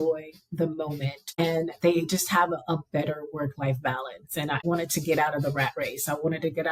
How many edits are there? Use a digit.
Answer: 2